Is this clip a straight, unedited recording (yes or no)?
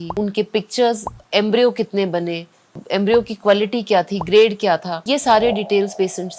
yes